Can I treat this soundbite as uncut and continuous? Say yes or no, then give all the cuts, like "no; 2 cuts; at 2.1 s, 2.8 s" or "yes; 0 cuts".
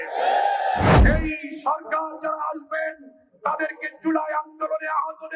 no; 1 cut; at 1.0 s